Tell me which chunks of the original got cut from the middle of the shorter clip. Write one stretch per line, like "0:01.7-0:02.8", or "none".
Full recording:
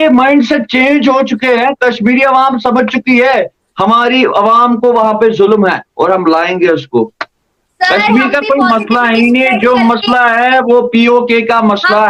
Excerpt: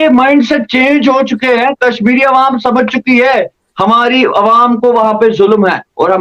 none